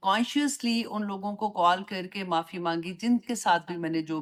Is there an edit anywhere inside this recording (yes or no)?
no